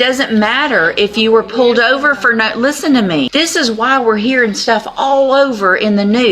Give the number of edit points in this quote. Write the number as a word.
one